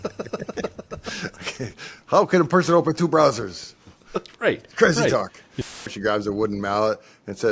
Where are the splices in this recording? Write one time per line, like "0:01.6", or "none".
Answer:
0:05.8